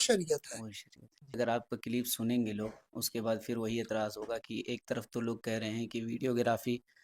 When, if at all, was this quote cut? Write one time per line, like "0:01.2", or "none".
0:01.4